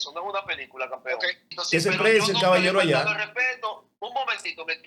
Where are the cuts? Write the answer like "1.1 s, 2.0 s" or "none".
1.5 s